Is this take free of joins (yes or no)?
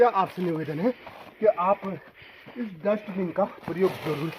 yes